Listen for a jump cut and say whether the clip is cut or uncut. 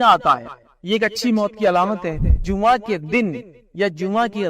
cut